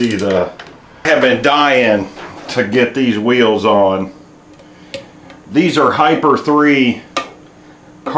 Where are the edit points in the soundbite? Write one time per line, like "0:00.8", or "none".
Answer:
0:01.1